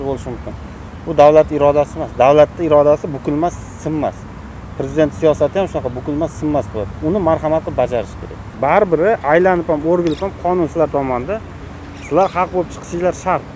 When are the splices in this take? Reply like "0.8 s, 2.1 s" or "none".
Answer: none